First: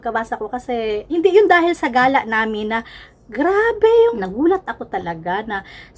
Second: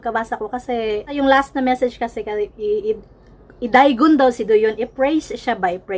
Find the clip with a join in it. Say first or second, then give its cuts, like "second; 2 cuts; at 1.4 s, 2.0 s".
first; 2 cuts; at 1.1 s, 4.0 s